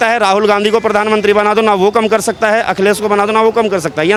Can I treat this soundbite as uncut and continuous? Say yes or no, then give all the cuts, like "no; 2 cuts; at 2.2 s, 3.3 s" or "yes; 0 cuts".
yes; 0 cuts